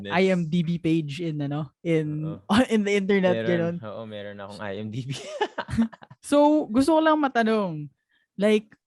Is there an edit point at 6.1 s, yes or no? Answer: no